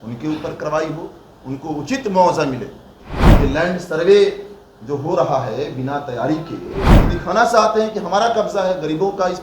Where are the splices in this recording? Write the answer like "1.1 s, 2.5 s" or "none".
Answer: 3.2 s, 7.0 s